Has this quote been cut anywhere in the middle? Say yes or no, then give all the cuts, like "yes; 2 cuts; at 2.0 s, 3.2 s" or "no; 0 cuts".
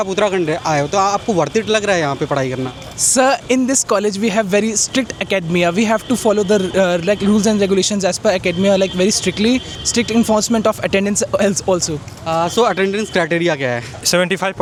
no; 0 cuts